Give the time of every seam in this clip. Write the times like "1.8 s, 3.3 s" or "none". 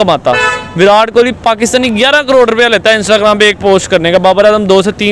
none